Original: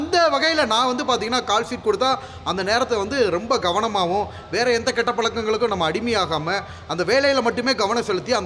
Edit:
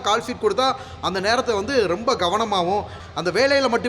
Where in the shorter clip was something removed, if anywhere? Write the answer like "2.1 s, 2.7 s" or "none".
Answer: 3.0 s